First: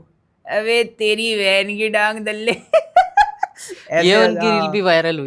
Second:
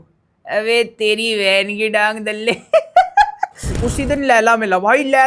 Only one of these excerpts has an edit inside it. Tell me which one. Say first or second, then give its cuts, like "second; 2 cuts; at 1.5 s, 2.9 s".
second; 1 cut; at 3.8 s